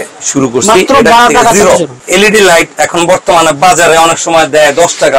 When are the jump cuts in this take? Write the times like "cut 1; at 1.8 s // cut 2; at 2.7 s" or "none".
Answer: cut 1; at 2.0 s